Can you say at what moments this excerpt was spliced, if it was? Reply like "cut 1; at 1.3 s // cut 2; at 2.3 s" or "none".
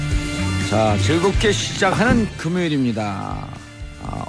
none